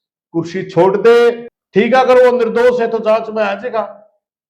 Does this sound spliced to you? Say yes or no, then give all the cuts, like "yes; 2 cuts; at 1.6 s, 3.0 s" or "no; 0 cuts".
yes; 1 cut; at 1.5 s